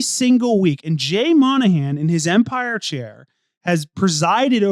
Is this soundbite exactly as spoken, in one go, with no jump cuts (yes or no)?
yes